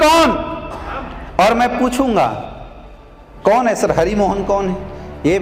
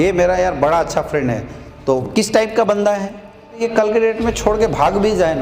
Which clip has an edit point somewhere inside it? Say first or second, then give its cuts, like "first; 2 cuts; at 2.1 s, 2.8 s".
second; 1 cut; at 3.6 s